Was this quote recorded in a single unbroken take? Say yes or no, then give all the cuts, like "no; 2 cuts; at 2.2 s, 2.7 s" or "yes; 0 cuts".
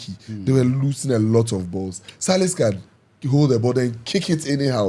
yes; 0 cuts